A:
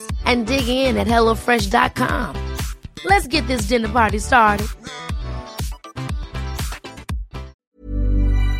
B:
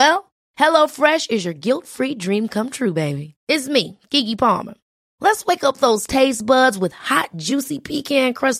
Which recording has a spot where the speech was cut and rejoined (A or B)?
A